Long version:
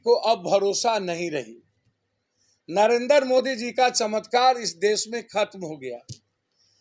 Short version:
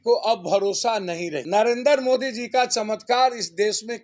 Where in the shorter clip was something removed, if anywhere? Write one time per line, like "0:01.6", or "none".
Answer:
0:01.4